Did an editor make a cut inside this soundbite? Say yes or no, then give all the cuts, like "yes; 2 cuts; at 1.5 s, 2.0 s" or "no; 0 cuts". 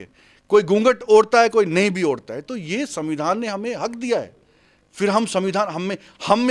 no; 0 cuts